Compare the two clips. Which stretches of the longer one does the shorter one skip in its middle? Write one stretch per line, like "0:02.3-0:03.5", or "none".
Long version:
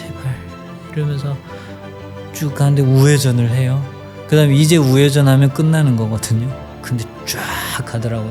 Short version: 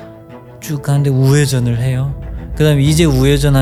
none